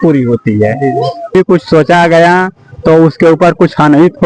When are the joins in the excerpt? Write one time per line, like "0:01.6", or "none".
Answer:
0:01.3